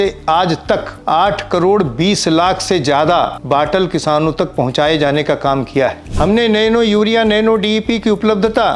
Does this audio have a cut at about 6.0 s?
yes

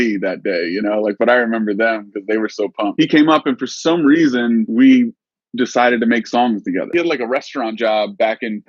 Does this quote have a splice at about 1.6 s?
no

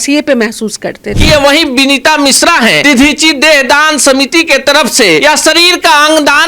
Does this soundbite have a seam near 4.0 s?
no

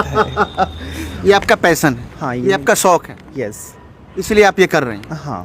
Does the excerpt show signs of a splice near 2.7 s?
no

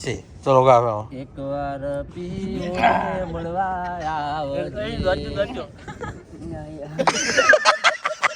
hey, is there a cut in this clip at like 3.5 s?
no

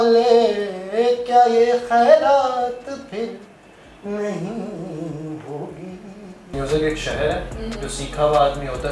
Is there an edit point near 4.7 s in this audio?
no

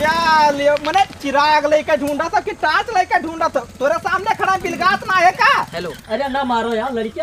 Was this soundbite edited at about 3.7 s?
no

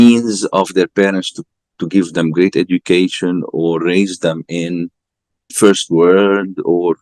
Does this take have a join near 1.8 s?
no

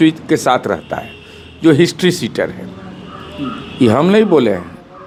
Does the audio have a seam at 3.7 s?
no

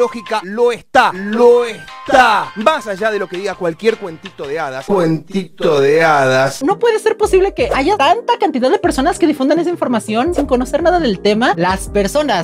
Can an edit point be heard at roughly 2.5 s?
yes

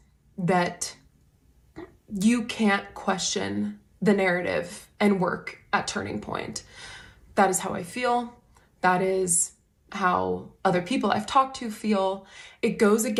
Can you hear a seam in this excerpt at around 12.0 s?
no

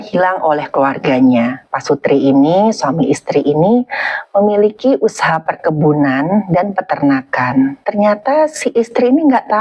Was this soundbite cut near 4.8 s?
no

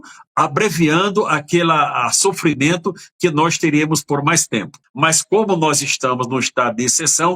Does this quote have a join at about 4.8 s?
yes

